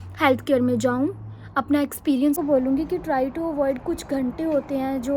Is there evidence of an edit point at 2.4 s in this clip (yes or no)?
yes